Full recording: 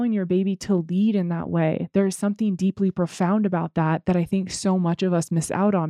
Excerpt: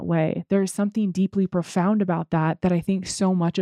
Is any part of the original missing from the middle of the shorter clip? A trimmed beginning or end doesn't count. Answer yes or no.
no